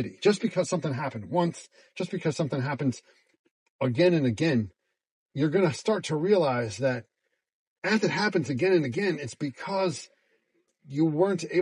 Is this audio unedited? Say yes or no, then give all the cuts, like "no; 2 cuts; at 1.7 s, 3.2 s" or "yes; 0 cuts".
yes; 0 cuts